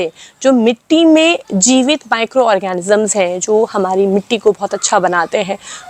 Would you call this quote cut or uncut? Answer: uncut